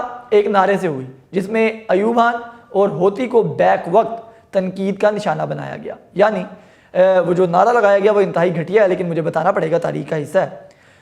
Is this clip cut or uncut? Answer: uncut